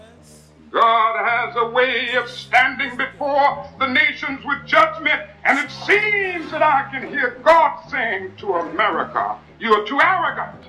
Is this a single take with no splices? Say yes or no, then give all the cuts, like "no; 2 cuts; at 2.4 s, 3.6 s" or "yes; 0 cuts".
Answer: yes; 0 cuts